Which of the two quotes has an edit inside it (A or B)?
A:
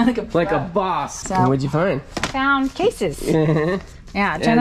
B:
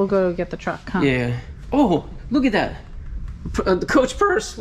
A